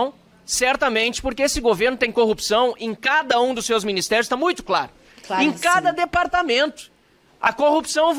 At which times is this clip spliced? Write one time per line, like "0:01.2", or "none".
none

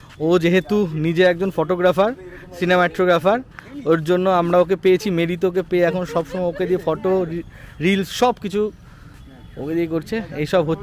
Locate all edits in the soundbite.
none

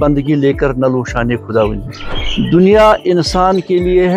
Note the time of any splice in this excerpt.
0:02.2

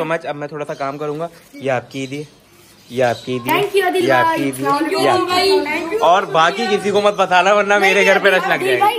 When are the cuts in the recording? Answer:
none

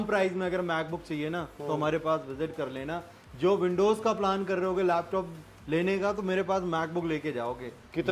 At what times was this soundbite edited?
none

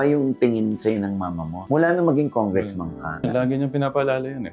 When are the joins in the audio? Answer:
0:03.3

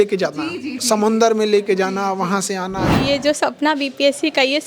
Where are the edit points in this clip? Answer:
0:02.9

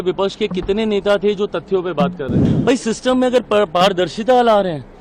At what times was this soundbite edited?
0:02.4

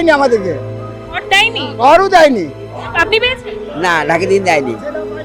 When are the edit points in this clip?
none

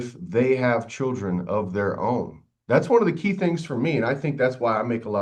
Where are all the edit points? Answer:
none

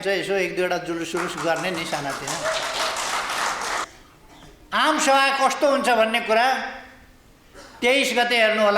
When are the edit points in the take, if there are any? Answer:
0:03.9

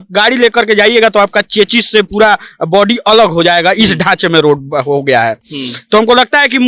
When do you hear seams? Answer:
none

